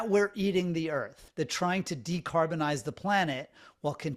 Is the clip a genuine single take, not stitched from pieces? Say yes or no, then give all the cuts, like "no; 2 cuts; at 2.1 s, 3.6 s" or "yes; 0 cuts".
no; 1 cut; at 1.2 s